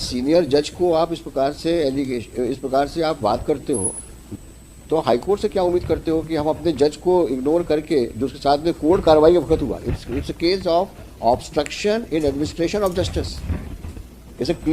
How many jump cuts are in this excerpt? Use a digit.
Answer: 1